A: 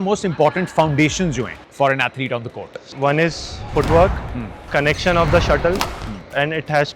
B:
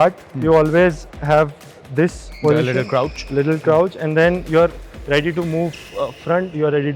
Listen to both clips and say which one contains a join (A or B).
A